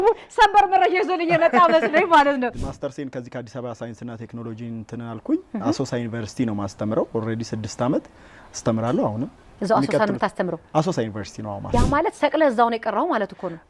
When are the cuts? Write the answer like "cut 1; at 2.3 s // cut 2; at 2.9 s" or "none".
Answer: cut 1; at 2.6 s // cut 2; at 11.7 s